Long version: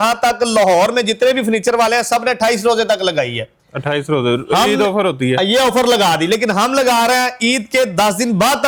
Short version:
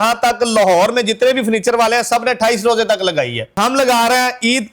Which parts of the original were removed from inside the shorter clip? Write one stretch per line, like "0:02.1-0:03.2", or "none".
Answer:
0:03.6-0:06.5